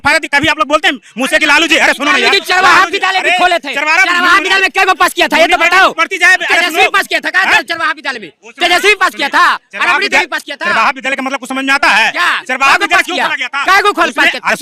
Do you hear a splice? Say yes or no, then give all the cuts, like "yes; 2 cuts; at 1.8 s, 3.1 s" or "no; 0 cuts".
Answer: no; 0 cuts